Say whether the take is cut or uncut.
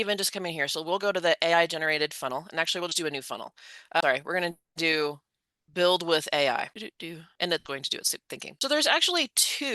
cut